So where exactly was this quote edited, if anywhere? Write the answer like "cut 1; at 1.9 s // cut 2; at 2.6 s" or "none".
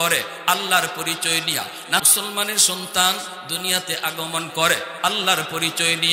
cut 1; at 2.0 s